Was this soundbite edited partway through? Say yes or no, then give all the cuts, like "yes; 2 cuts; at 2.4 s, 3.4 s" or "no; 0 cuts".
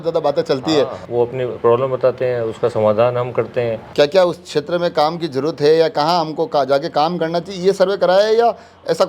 yes; 2 cuts; at 1.0 s, 3.8 s